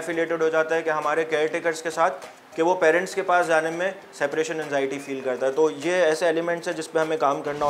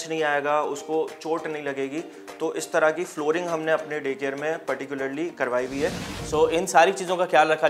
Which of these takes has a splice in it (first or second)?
second